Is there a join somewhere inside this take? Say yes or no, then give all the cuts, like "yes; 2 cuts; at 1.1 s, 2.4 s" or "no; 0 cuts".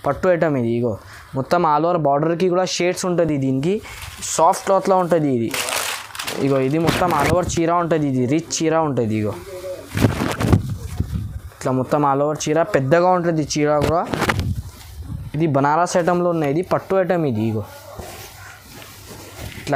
no; 0 cuts